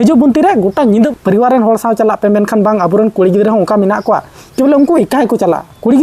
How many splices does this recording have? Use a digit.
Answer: 1